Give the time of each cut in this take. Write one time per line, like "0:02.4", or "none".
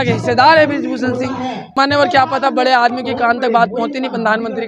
0:01.7